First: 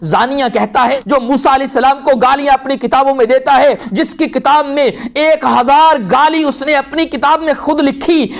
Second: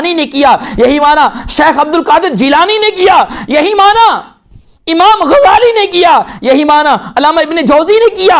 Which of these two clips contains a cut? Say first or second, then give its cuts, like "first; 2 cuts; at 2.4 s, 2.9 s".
first; 2 cuts; at 0.9 s, 3.8 s